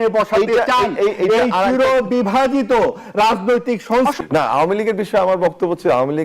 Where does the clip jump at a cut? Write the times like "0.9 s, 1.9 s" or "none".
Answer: 4.2 s